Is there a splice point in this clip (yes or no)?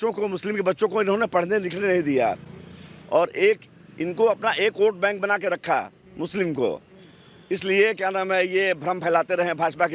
no